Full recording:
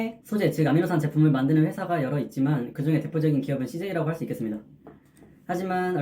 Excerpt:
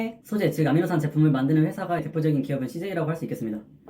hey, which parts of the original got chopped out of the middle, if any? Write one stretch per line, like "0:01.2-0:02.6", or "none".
0:02.0-0:03.0